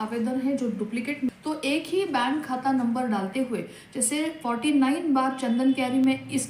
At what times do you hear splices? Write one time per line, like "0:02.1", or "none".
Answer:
0:01.3